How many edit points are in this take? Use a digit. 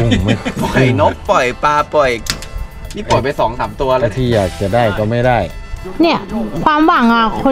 0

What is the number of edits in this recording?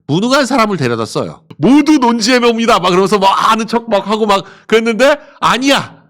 1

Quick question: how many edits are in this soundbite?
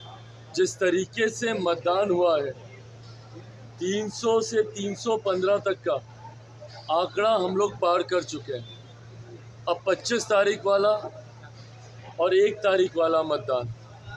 0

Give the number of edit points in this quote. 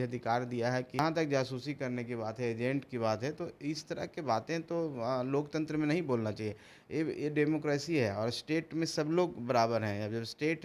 1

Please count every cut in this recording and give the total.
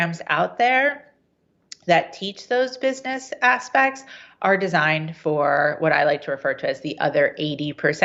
0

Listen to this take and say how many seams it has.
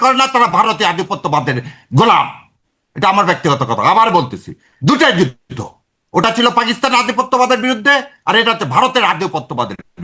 0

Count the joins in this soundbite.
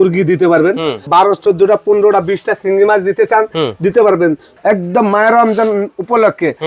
2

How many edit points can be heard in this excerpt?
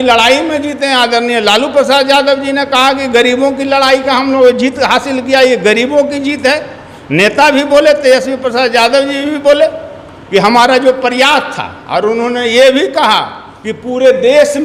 0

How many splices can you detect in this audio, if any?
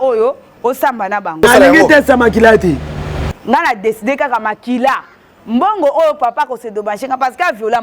2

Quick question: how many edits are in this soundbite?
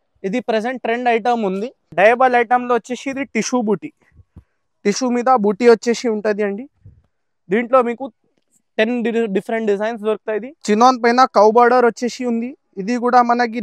2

